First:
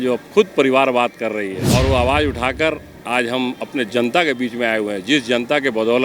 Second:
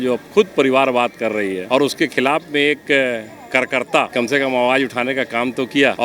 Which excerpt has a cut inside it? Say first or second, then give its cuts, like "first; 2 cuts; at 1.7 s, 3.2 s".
first; 1 cut; at 1.7 s